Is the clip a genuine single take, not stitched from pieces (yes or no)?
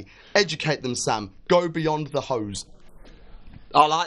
yes